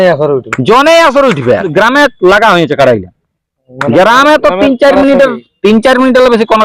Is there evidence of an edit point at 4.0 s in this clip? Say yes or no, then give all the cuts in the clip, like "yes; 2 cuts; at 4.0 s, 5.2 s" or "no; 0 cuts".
no; 1 cut; at 1.7 s